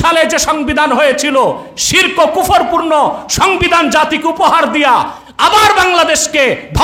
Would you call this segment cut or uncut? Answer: uncut